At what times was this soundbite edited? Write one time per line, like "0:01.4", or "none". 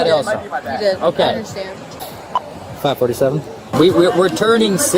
0:03.7